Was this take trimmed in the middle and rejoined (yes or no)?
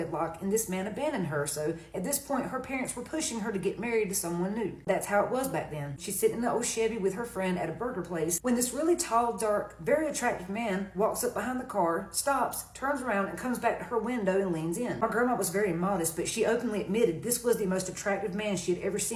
no